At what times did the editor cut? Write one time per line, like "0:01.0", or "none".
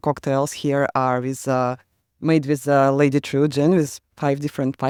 none